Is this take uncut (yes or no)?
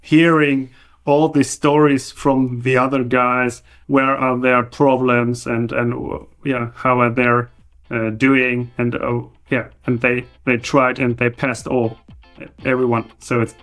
no